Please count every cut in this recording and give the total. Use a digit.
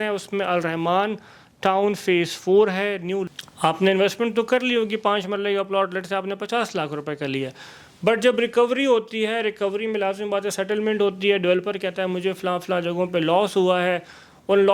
1